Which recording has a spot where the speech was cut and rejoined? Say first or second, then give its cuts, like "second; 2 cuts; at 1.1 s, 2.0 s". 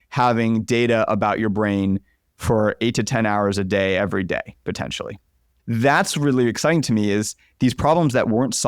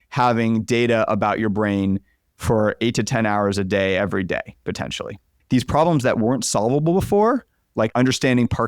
second; 2 cuts; at 5.3 s, 7.9 s